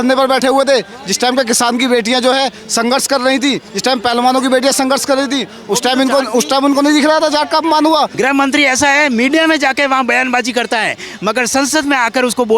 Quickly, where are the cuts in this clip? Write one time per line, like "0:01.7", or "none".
0:08.1